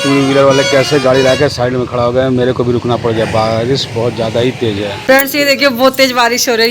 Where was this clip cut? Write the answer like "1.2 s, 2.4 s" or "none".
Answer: 5.0 s